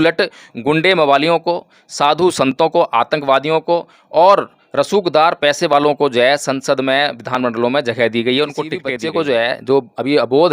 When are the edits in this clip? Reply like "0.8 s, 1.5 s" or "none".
8.9 s